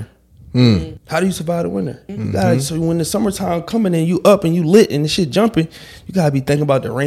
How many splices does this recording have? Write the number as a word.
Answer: two